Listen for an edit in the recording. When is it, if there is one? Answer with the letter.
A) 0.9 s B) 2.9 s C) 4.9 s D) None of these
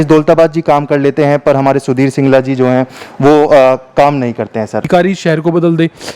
C